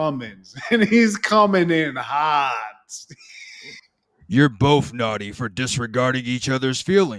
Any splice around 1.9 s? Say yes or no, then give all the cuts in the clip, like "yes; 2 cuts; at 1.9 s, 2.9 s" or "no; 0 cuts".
no; 0 cuts